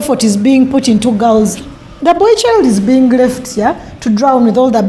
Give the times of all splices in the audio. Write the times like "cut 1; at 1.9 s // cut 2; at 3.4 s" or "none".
cut 1; at 1.7 s